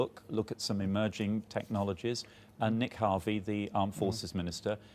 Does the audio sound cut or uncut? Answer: uncut